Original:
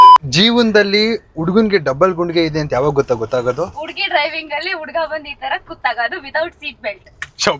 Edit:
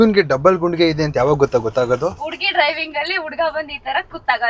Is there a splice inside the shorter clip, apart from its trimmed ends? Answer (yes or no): no